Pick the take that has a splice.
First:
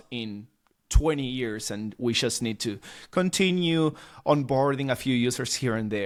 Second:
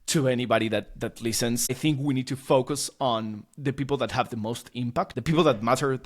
second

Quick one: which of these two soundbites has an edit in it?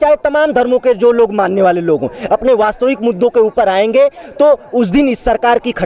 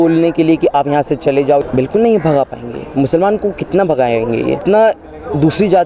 second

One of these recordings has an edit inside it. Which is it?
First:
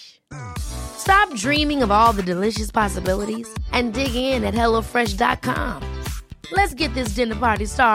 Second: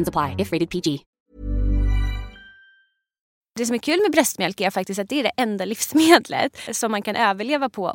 second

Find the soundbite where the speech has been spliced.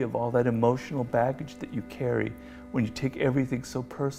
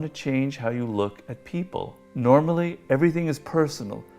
second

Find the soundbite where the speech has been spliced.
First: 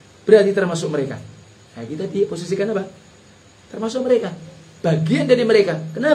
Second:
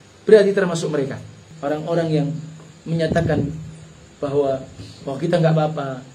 second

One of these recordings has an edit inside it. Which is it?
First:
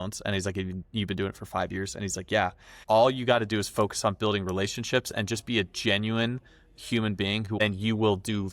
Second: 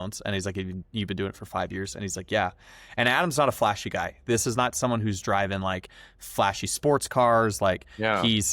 first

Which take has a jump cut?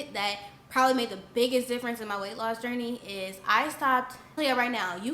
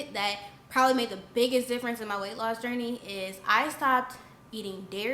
first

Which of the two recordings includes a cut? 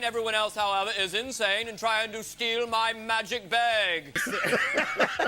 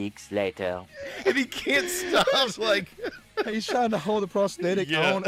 first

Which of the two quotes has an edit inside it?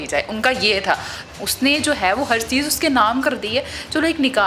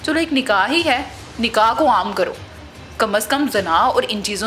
first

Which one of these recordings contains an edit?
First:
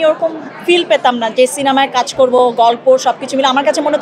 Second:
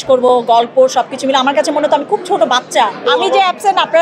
second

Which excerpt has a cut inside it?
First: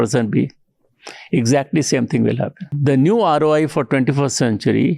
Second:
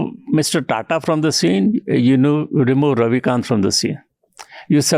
first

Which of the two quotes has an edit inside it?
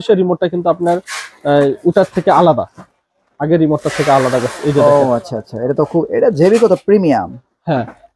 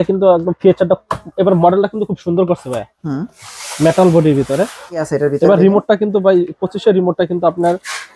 second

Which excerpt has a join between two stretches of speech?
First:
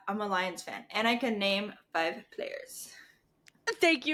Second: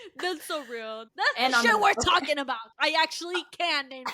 second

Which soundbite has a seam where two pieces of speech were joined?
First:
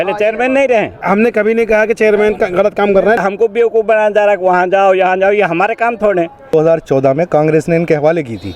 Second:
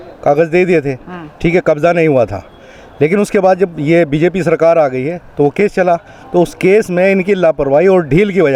first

